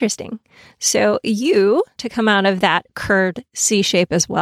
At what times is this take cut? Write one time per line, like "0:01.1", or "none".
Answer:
0:02.0